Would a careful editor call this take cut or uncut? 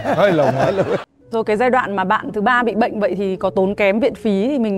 cut